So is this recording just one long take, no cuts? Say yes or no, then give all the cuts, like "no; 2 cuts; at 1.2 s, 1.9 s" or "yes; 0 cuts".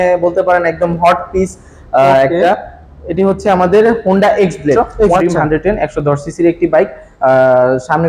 no; 1 cut; at 5.2 s